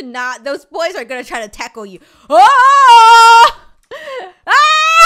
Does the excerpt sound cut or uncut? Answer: uncut